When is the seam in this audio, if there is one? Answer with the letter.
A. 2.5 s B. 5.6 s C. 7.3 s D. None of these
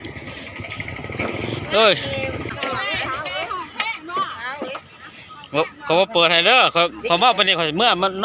A